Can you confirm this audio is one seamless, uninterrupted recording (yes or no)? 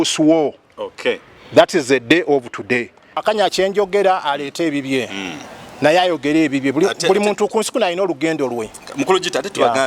no